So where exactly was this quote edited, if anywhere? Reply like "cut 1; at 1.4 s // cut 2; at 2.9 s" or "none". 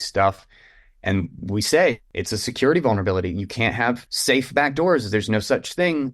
cut 1; at 2.0 s // cut 2; at 4.1 s